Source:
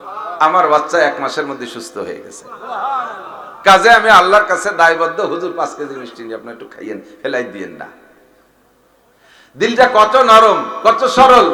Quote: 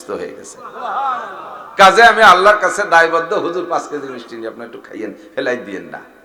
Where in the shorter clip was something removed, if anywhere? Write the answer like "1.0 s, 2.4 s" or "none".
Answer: none